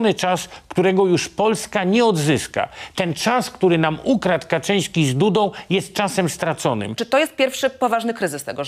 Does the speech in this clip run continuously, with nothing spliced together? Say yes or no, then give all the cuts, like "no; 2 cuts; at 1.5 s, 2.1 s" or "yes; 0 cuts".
no; 1 cut; at 6.9 s